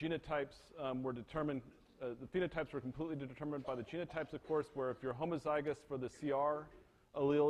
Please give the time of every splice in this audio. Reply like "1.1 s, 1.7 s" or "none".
1.3 s